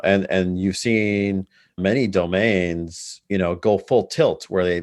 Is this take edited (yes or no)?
yes